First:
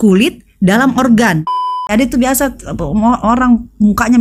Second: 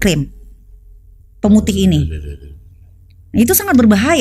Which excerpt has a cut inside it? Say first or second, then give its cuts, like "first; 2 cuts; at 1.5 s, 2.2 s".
first; 1 cut; at 1.9 s